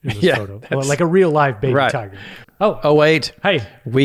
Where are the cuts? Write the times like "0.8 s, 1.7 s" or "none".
2.4 s